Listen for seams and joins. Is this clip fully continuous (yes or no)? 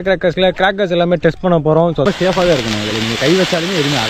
no